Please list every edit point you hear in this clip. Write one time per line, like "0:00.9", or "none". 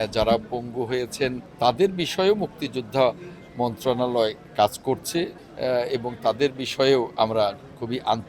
0:01.5
0:05.4